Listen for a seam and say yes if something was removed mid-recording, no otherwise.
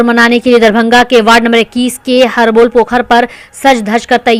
no